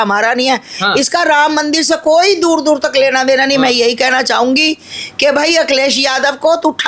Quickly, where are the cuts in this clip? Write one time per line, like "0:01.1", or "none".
none

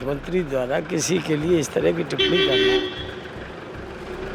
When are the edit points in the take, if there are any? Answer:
none

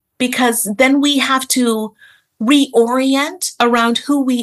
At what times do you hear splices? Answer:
none

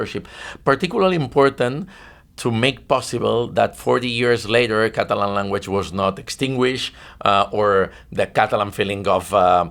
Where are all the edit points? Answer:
none

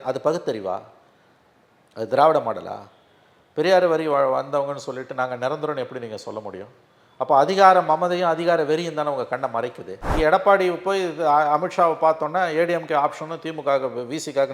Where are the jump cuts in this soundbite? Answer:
0:10.1

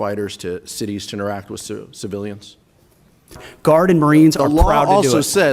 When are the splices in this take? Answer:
0:03.5

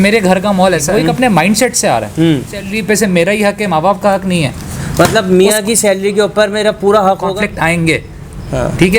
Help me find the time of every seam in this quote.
0:00.9
0:02.7
0:07.3

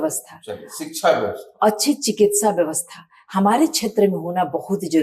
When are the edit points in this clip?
none

